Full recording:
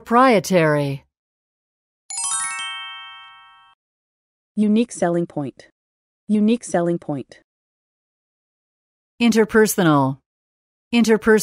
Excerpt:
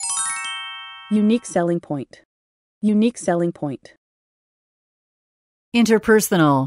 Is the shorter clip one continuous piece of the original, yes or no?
no